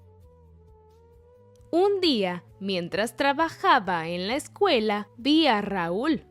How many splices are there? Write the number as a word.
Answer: one